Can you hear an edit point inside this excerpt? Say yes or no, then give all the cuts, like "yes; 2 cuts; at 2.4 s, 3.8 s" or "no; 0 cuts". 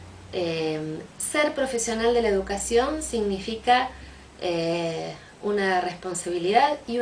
yes; 1 cut; at 2.1 s